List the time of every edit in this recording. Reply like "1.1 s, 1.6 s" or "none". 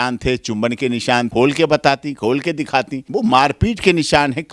1.3 s, 3.0 s

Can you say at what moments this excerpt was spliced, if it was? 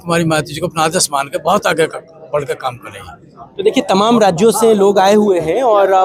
none

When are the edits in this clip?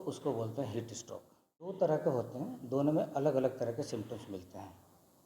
1.7 s

